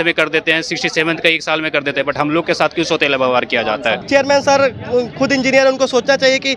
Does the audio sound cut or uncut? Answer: cut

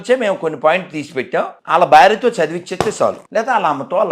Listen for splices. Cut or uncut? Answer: cut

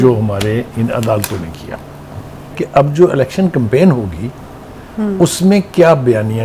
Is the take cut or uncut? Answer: cut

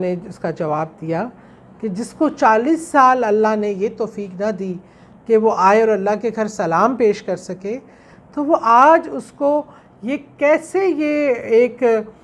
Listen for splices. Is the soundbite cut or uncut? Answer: uncut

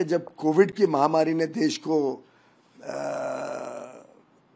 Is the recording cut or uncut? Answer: uncut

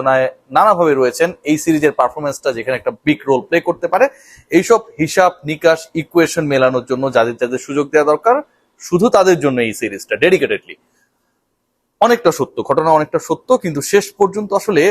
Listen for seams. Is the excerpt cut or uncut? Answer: uncut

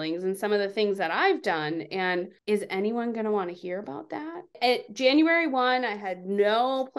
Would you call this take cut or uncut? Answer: cut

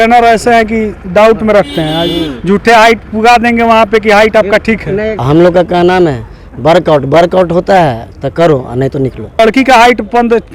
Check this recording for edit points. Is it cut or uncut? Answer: cut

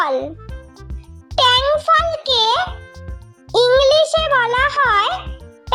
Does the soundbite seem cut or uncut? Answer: uncut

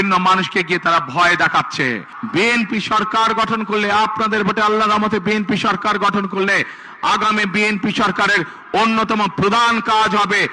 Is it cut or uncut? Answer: cut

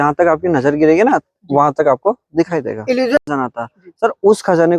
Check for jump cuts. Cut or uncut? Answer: cut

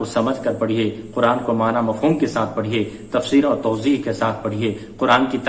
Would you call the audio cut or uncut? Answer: uncut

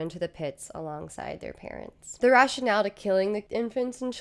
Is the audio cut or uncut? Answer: uncut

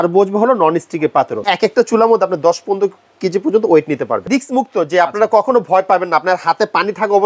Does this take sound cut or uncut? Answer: cut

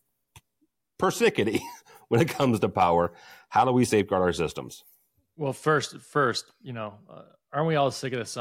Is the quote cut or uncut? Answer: uncut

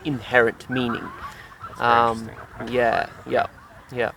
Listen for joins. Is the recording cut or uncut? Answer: uncut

